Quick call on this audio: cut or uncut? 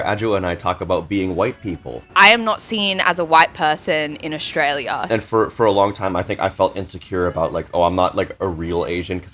cut